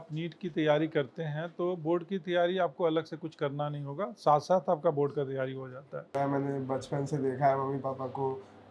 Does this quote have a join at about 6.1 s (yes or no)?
yes